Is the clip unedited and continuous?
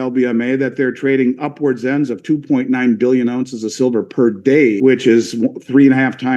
no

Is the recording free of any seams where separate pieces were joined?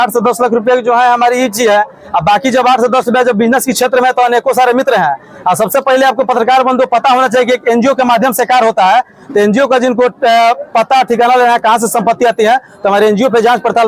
yes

